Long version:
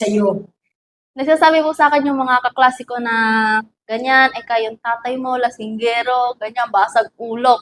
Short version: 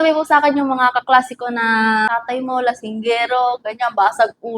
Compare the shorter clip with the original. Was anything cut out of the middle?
yes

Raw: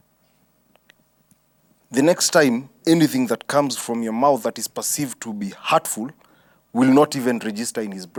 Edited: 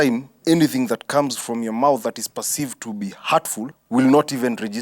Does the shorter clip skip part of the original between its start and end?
yes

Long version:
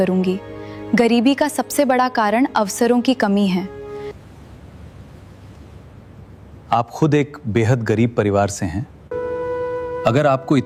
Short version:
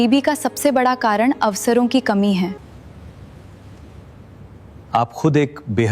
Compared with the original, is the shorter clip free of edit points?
no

